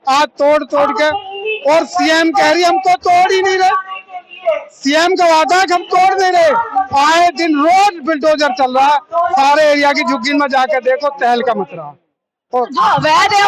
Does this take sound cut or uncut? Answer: uncut